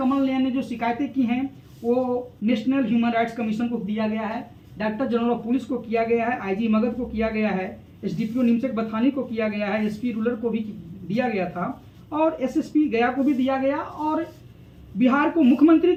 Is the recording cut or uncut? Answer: uncut